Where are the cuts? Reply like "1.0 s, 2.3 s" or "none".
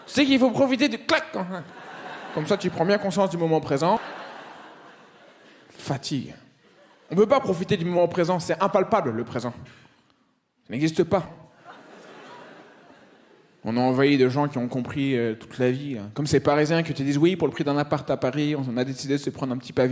11.3 s